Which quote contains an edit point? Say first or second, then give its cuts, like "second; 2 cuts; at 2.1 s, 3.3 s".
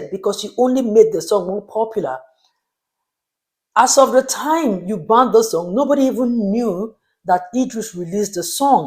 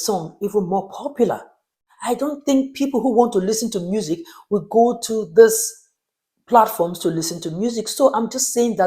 second; 1 cut; at 1.9 s